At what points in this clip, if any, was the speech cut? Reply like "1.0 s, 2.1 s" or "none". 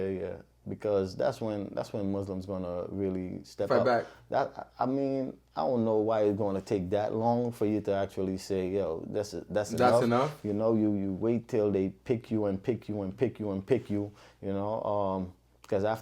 none